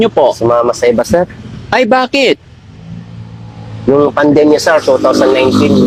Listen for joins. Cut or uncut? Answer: uncut